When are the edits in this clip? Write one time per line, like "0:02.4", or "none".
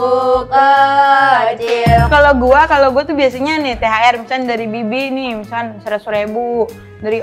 0:02.1